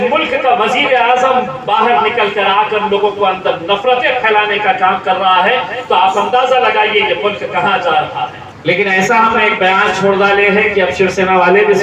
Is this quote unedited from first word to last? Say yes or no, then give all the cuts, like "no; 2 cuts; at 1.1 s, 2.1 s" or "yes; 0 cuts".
no; 1 cut; at 8.5 s